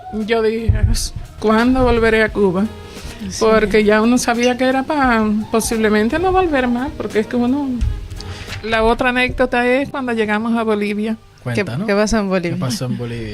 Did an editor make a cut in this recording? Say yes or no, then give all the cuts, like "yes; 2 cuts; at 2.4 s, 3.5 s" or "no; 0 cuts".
yes; 2 cuts; at 8.6 s, 11.3 s